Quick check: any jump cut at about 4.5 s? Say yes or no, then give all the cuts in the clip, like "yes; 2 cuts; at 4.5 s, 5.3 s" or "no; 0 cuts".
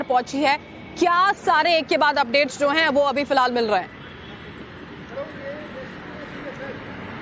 yes; 1 cut; at 4.5 s